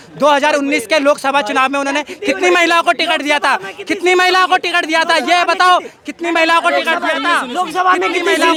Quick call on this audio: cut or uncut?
uncut